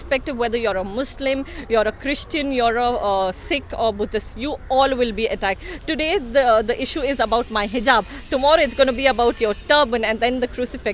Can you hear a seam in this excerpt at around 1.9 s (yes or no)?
no